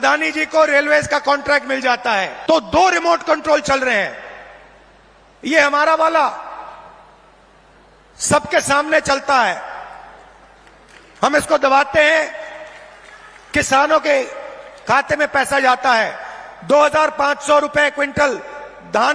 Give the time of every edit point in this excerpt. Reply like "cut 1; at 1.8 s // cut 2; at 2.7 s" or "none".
cut 1; at 2.3 s